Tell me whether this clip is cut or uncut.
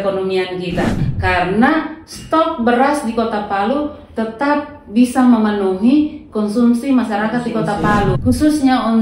cut